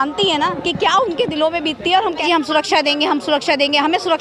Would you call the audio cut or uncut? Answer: cut